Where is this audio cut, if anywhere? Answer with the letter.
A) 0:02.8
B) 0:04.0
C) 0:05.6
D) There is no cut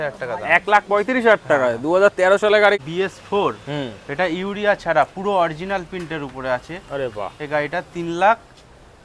A